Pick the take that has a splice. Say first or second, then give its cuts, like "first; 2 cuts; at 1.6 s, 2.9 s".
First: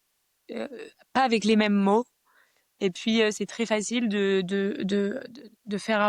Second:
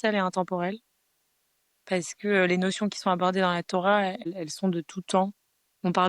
second; 1 cut; at 4.2 s